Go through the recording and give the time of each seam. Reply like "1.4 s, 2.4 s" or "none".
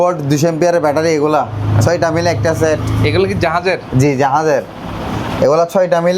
none